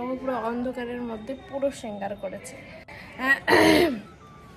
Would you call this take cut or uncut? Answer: uncut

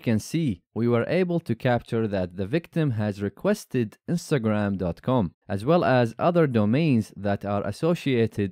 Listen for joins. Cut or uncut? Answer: uncut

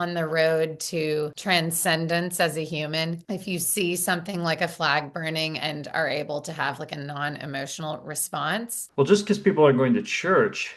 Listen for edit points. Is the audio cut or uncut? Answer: cut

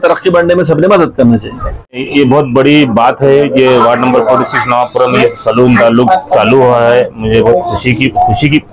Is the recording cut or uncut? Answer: uncut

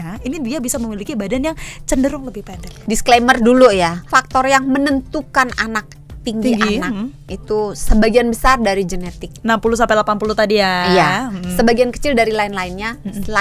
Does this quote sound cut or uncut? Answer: cut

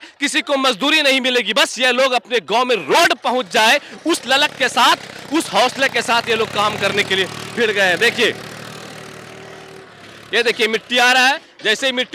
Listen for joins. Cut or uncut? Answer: uncut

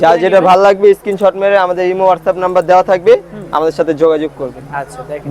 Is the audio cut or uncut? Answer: uncut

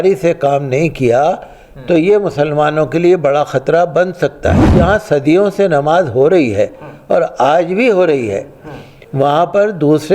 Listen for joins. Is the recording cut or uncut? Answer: cut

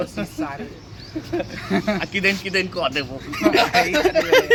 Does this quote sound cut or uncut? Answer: uncut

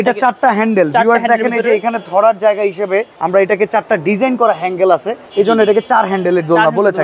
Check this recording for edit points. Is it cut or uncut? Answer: cut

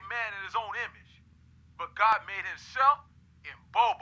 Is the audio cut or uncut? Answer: uncut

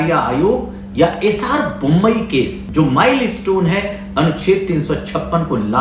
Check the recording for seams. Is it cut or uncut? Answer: cut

